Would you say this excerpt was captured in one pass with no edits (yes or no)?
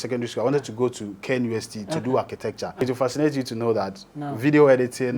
no